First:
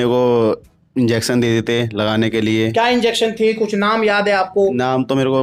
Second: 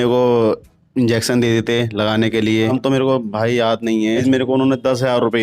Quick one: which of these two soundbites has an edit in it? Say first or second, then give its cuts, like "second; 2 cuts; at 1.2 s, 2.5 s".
second; 2 cuts; at 2.7 s, 4.2 s